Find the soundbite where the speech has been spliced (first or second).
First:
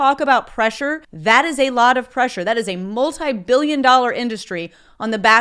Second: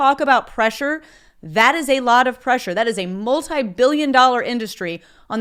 first